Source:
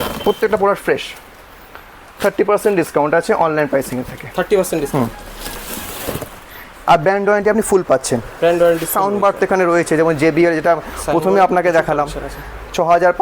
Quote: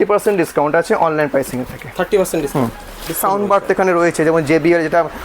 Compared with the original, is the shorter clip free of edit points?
no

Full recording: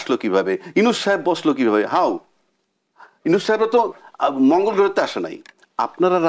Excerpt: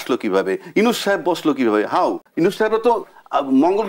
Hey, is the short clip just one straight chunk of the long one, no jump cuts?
no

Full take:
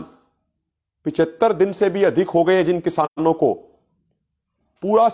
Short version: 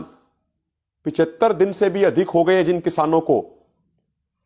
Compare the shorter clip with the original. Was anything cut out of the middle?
yes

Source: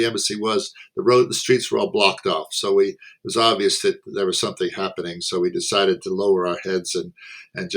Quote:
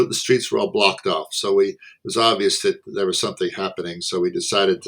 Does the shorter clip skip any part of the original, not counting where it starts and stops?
no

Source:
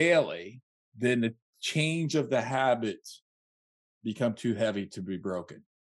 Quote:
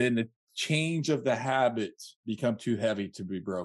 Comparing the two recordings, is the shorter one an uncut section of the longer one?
no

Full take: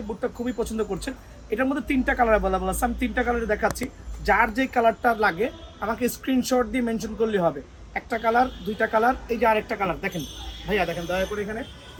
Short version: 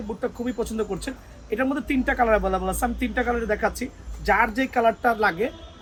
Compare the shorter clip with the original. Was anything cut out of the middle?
no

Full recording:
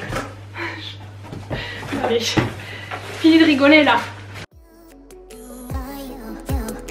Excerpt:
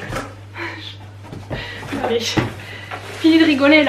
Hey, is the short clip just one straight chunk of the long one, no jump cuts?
yes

